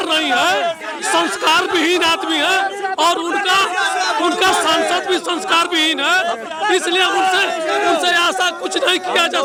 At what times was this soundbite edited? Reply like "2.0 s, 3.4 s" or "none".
none